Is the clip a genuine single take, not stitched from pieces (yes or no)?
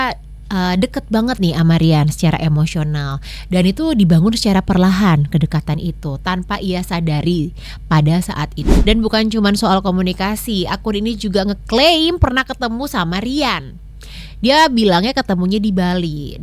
no